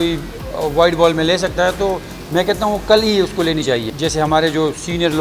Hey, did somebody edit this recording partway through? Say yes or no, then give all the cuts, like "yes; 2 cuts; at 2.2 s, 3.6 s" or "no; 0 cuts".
yes; 1 cut; at 3.9 s